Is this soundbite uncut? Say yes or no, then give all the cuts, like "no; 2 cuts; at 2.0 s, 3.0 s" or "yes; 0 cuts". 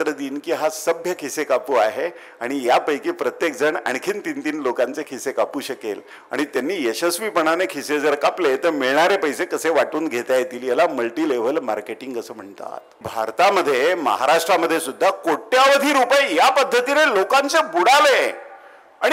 no; 1 cut; at 13.0 s